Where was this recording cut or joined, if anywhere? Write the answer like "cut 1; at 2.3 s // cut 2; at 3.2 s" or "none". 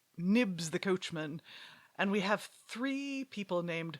cut 1; at 1.7 s